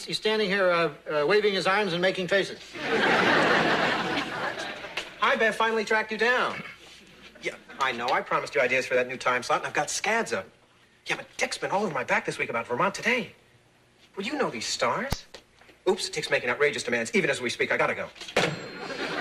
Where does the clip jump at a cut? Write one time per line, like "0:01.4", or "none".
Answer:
0:07.2